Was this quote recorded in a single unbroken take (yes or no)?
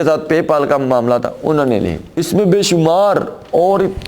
no